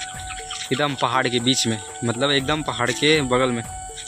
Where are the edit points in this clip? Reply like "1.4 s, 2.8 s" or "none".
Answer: none